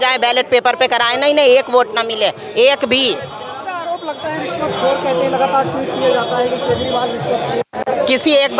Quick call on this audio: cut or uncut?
uncut